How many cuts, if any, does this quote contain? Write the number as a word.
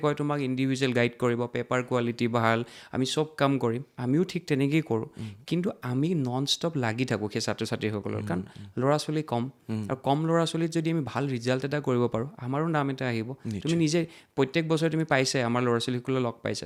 zero